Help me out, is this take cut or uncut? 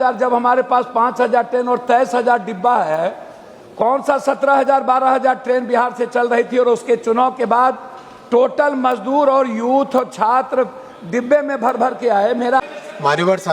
cut